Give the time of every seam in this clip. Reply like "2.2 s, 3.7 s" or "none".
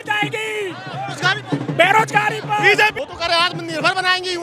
2.9 s